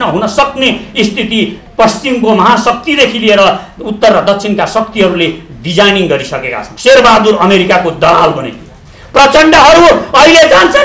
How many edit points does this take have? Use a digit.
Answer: 1